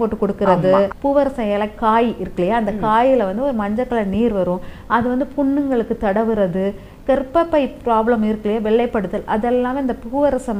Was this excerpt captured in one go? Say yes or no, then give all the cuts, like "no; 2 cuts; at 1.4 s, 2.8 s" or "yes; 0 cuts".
no; 1 cut; at 0.9 s